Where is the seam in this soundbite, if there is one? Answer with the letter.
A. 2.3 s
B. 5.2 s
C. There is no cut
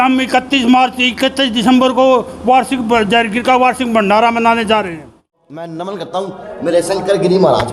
B